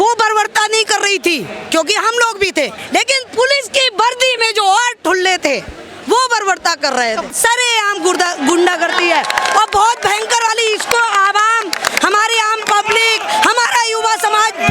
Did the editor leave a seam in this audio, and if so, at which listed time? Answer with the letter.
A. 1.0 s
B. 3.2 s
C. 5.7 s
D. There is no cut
D